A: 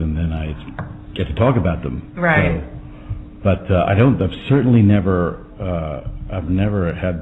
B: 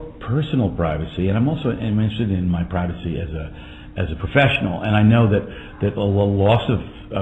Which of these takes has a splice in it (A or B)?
B